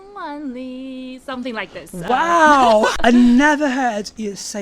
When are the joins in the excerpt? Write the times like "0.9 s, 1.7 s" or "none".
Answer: 3.0 s